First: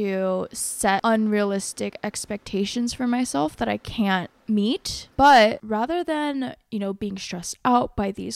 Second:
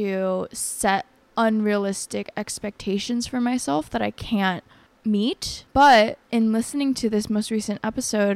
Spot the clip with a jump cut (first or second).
first